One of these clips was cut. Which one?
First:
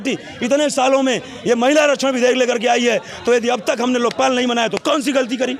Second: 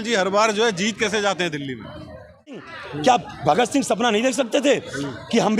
second; 1 cut; at 2.7 s

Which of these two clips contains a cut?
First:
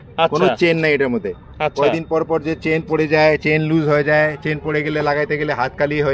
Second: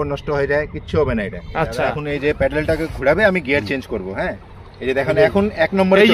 second; 1 cut; at 1.8 s

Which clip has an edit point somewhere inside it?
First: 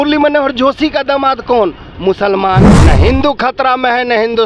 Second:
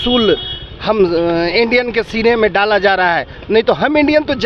first; 1 cut; at 2.7 s

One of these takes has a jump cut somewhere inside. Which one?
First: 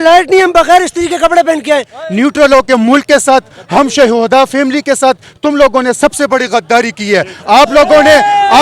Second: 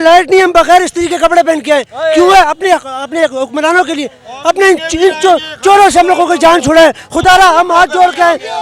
first; 1 cut; at 2.0 s

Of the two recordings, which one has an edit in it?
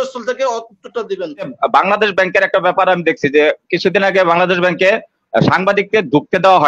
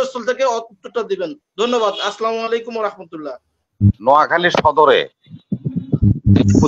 first; 1 cut; at 1.5 s

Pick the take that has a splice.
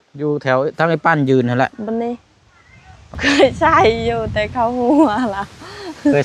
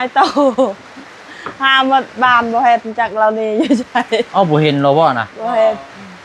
first; 1 cut; at 3.2 s

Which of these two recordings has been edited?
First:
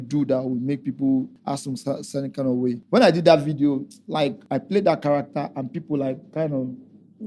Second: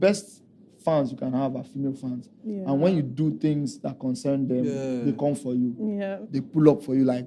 first; 3 cuts; at 1.3 s, 2.8 s, 4.4 s

